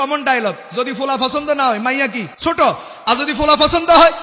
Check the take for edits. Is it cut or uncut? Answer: cut